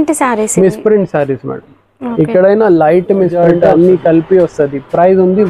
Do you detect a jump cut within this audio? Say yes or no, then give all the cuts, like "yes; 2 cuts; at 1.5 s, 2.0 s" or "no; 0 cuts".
yes; 1 cut; at 3.4 s